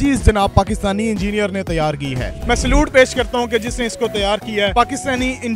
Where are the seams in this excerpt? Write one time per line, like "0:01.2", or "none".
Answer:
0:02.3
0:04.7